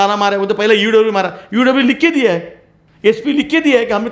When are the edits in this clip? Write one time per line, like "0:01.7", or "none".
none